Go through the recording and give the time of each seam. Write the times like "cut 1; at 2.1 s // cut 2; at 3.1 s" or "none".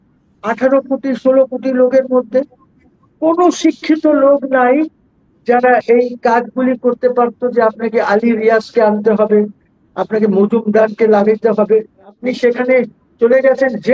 cut 1; at 12.2 s